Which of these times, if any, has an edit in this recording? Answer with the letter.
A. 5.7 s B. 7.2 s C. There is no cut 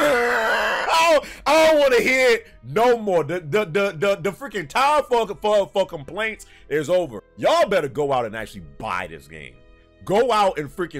B